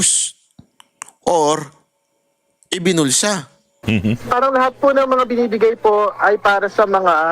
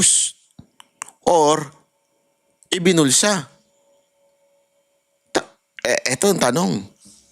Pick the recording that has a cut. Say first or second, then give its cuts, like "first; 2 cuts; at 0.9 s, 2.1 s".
first; 1 cut; at 3.8 s